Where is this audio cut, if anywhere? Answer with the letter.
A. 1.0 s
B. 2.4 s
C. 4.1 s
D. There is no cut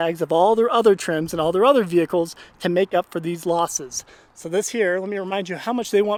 D